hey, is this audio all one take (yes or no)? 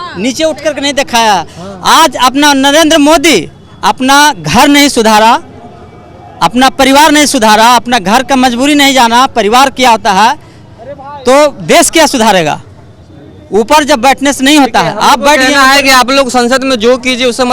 yes